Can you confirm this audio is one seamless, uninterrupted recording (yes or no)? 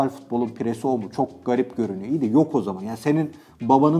yes